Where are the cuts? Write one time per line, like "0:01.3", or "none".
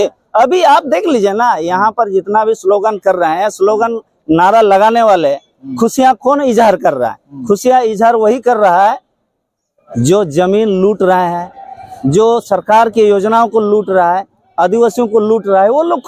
none